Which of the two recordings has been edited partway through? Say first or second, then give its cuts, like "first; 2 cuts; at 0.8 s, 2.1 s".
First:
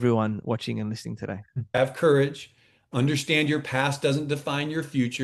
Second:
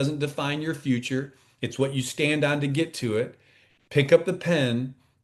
first; 1 cut; at 1.8 s